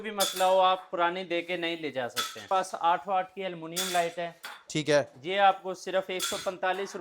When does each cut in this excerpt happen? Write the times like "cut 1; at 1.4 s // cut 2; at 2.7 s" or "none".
cut 1; at 2.4 s